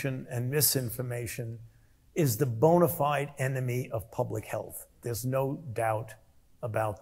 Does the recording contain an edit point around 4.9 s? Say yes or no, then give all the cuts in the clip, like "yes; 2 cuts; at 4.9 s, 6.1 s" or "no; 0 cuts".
no; 0 cuts